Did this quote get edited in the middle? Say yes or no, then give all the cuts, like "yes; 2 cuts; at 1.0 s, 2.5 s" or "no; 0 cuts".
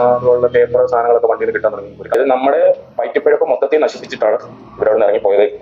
yes; 1 cut; at 2.1 s